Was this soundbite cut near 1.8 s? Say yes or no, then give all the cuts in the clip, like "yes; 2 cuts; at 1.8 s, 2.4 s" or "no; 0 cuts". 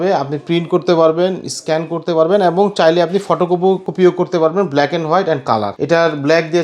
no; 2 cuts; at 3.9 s, 5.7 s